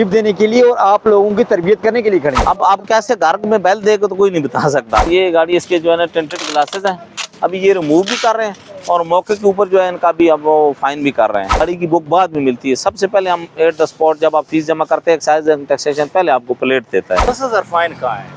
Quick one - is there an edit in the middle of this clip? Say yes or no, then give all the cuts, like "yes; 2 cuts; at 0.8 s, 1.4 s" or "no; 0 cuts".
yes; 4 cuts; at 2.4 s, 5.1 s, 11.6 s, 17.3 s